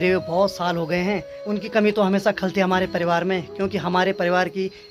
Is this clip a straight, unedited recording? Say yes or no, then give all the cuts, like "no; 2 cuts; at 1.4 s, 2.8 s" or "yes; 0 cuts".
yes; 0 cuts